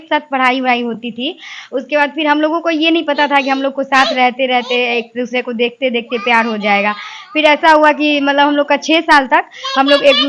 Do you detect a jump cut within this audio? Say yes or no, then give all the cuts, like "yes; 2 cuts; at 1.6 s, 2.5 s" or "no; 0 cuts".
no; 0 cuts